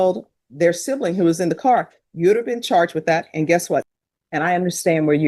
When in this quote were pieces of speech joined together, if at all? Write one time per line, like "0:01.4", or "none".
0:03.9